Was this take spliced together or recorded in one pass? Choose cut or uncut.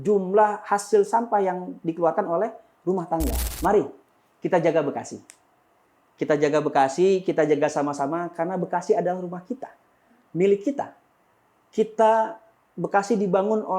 cut